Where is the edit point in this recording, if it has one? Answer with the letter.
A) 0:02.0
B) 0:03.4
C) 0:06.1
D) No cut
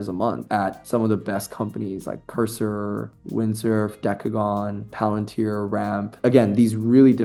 D